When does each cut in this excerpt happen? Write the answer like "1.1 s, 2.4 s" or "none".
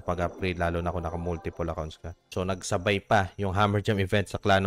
none